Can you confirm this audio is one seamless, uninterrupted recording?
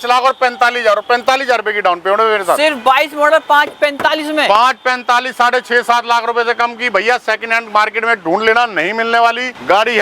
yes; 0 cuts

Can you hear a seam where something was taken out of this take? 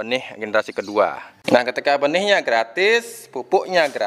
yes; 1 cut; at 1.3 s

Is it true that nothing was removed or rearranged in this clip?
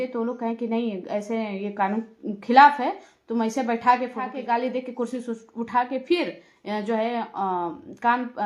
no; 1 cut; at 4.4 s

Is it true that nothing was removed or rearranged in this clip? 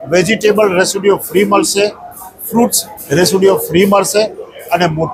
yes; 0 cuts

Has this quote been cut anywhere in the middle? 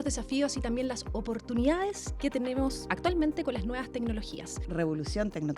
yes; 3 cuts; at 2.1 s, 2.9 s, 4.6 s

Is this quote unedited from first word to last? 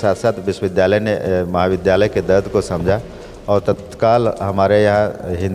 yes; 0 cuts

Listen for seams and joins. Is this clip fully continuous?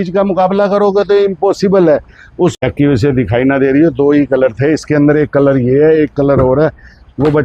no; 1 cut; at 2.6 s

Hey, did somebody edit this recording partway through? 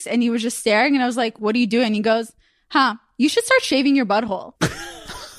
yes; 1 cut; at 1.4 s

